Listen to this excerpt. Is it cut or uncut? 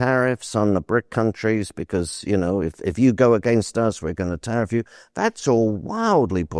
uncut